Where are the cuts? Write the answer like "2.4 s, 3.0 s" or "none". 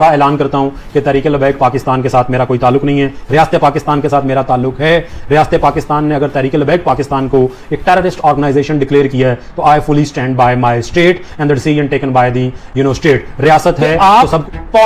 13.9 s